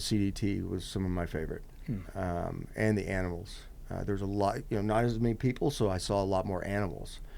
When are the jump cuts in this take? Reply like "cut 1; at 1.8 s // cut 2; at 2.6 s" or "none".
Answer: none